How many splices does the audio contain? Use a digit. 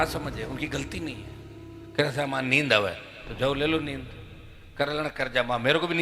0